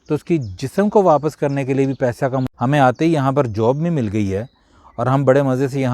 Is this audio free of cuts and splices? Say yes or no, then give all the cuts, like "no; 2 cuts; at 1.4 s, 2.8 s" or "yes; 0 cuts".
no; 1 cut; at 2.5 s